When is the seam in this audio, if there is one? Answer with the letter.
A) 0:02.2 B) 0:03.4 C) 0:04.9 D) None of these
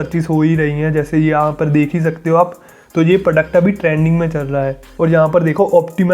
C